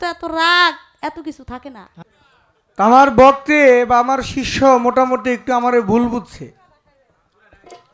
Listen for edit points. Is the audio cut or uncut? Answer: cut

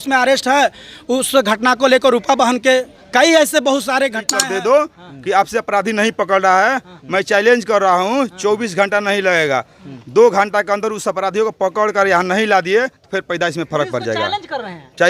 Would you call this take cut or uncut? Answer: cut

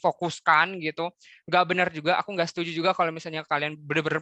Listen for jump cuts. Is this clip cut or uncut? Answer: uncut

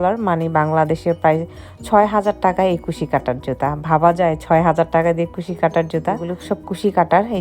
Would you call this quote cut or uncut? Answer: cut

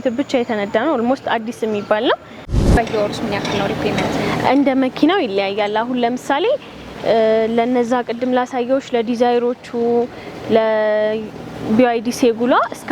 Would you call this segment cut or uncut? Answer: cut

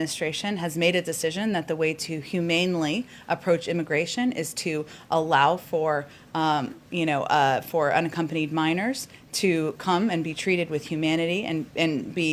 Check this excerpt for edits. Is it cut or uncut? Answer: uncut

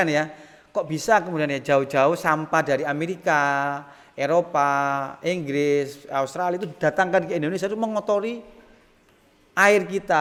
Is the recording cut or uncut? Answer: uncut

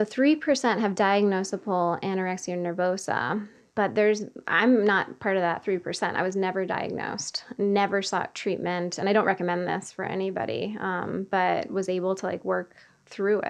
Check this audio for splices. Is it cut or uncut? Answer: uncut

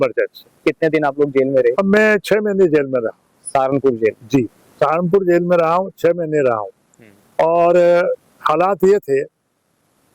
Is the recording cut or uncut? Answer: uncut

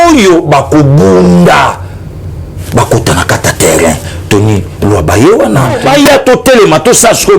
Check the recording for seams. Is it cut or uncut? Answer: cut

